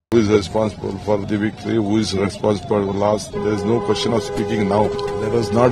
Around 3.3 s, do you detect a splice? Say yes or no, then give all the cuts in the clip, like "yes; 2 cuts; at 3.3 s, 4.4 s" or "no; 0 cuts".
no; 2 cuts; at 1.2 s, 5.0 s